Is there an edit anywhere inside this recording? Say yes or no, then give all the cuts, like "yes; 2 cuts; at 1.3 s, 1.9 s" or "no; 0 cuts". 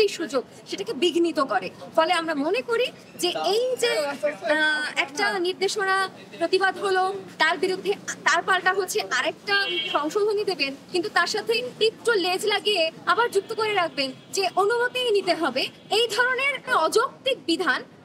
no; 0 cuts